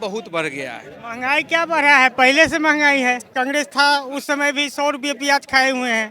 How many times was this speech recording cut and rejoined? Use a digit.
1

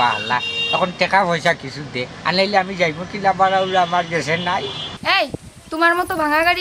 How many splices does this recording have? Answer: 1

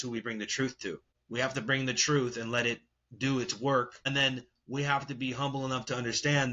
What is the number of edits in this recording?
2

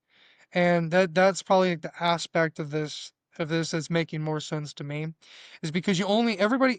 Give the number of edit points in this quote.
0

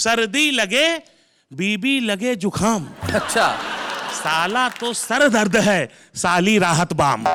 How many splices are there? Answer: 0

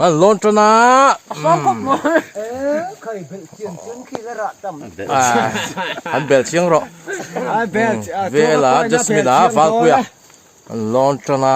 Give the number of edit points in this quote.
0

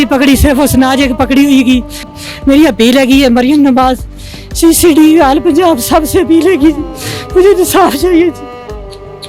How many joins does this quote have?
1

